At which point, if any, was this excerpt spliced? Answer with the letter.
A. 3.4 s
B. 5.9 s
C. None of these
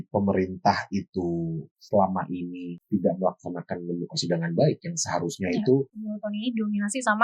B